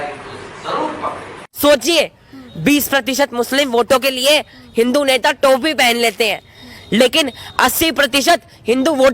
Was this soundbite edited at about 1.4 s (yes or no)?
yes